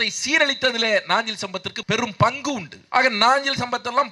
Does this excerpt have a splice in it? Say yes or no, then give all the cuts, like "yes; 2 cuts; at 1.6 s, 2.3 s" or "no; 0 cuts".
yes; 1 cut; at 2.7 s